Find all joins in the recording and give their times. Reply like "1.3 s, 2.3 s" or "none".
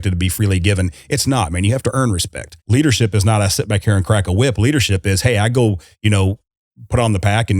2.6 s